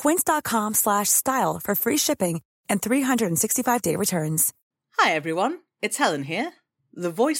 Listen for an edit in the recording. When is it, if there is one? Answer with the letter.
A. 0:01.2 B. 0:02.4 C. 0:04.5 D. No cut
C